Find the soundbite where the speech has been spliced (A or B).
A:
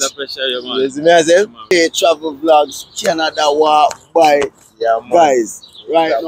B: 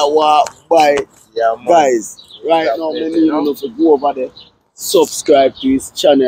A